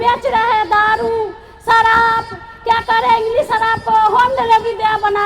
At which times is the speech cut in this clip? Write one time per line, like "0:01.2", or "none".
none